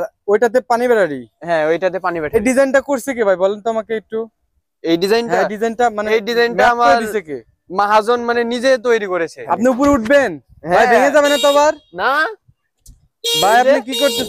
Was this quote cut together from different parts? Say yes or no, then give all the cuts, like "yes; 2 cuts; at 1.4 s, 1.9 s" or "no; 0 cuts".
yes; 2 cuts; at 2.3 s, 9.4 s